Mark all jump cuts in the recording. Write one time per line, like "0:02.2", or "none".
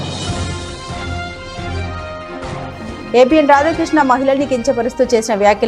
0:02.7